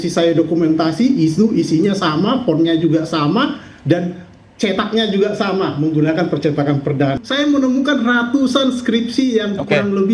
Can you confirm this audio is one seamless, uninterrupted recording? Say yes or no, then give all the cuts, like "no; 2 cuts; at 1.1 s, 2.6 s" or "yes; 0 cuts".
no; 1 cut; at 7.2 s